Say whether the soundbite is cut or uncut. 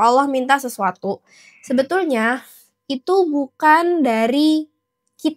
uncut